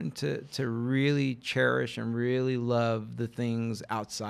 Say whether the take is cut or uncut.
uncut